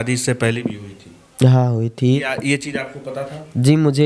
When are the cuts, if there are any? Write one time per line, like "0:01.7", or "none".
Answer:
none